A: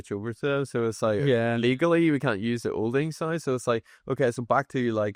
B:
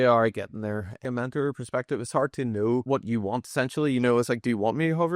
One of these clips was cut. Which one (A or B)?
B